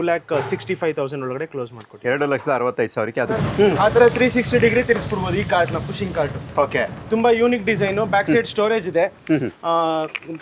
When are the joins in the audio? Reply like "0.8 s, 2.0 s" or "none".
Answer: 3.3 s